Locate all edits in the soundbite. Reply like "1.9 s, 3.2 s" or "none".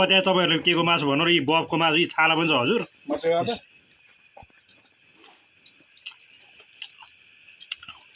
none